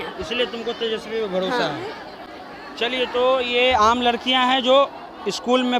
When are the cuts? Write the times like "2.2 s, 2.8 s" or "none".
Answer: none